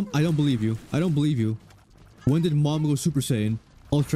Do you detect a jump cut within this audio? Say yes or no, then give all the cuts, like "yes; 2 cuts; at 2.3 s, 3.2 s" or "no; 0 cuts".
no; 0 cuts